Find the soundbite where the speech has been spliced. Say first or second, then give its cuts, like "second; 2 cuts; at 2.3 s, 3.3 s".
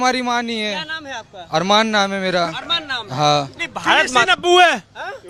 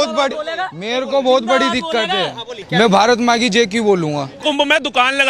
second; 2 cuts; at 2.6 s, 4.4 s